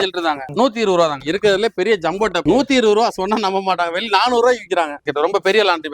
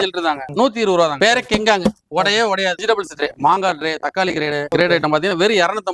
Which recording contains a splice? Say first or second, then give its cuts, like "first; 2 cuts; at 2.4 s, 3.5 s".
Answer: first; 2 cuts; at 1.1 s, 5.0 s